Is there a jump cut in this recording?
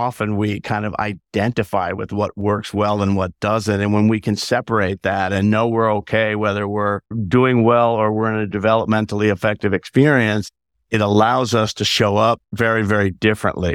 yes; 2 cuts; at 7.2 s, 12.5 s

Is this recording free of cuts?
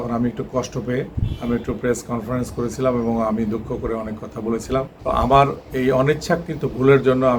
no; 2 cuts; at 1.2 s, 4.9 s

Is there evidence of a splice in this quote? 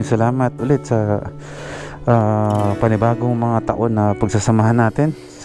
no; 0 cuts

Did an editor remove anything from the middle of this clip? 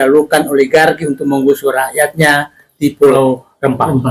yes; 1 cut; at 3.1 s

